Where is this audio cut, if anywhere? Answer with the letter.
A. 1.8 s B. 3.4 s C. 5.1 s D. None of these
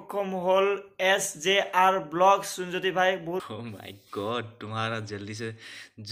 B